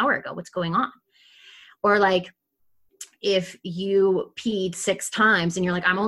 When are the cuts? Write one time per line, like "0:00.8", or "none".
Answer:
none